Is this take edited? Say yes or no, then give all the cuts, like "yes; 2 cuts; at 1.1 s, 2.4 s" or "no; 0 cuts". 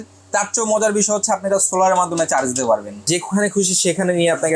yes; 1 cut; at 3.1 s